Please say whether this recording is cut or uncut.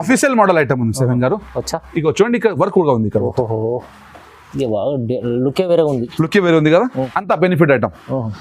cut